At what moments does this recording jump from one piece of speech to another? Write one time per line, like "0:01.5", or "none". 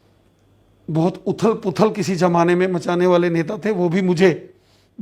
none